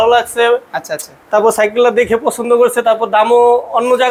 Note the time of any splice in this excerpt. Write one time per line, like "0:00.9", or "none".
none